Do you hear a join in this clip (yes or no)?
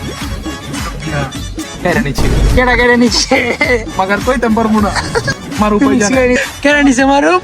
yes